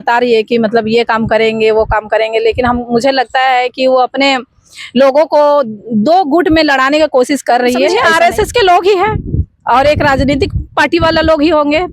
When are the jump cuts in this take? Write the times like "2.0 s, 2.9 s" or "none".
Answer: 8.0 s